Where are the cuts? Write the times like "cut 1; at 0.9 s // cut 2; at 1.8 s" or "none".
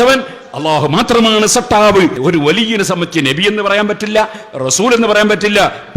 cut 1; at 2.2 s